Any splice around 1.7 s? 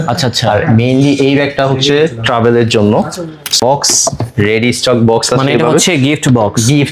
no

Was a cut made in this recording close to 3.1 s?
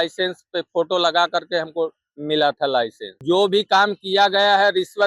yes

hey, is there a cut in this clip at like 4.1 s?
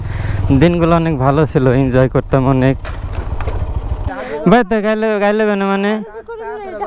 yes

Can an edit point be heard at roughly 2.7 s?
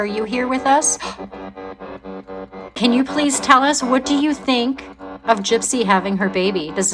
yes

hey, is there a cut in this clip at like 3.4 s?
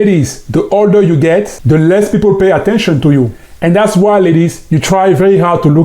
yes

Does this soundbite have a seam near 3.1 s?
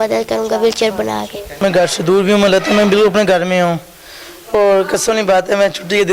no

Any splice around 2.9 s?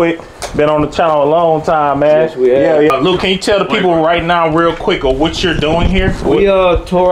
yes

